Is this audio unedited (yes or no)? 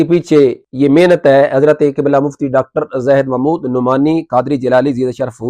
yes